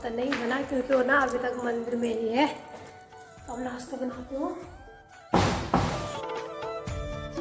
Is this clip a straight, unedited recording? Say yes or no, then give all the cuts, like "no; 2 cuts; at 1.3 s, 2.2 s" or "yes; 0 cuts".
yes; 0 cuts